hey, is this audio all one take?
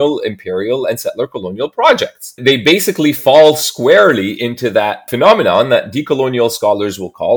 no; 2 cuts; at 2.3 s, 5.1 s

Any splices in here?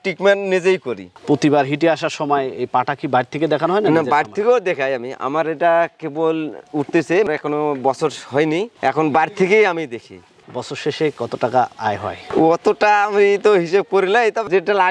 no; 0 cuts

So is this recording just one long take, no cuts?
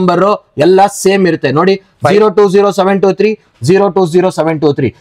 yes; 0 cuts

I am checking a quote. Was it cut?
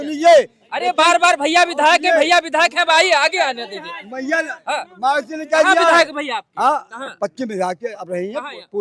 no; 0 cuts

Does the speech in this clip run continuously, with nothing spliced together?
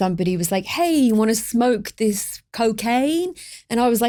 yes; 0 cuts

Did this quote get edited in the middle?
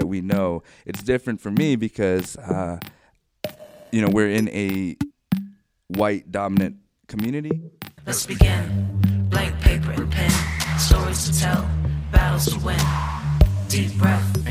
yes; 1 cut; at 7.9 s

